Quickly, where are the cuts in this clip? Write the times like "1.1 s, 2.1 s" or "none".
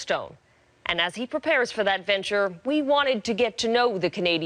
1.1 s